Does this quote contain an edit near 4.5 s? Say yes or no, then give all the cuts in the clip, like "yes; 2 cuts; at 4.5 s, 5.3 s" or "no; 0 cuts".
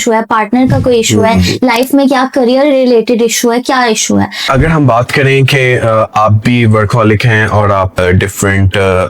yes; 2 cuts; at 4.5 s, 8.0 s